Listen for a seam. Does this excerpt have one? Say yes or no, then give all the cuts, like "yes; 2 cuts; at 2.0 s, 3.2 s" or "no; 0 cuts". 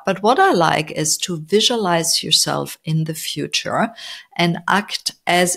no; 0 cuts